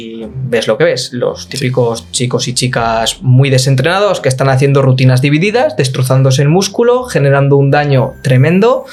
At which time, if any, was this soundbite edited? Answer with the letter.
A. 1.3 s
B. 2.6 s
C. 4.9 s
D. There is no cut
D